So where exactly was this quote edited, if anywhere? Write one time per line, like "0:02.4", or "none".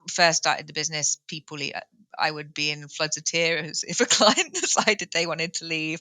none